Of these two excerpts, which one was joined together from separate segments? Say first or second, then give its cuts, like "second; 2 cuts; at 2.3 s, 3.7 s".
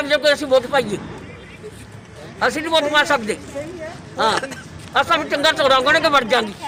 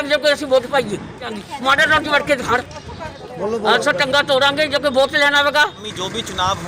second; 3 cuts; at 1.4 s, 3.1 s, 5.8 s